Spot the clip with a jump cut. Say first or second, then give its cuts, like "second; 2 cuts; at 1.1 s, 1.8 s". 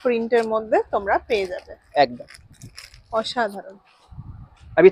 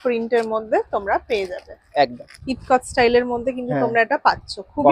second; 1 cut; at 2.3 s